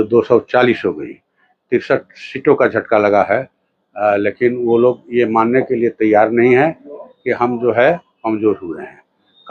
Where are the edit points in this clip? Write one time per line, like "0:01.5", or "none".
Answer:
none